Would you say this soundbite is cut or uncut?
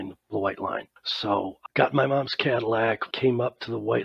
cut